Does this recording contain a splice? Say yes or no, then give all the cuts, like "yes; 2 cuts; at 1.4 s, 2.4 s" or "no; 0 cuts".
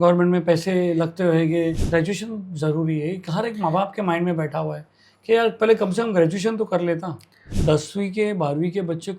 yes; 2 cuts; at 1.8 s, 7.5 s